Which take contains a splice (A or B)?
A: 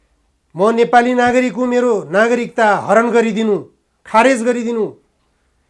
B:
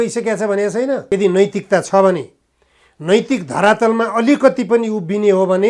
B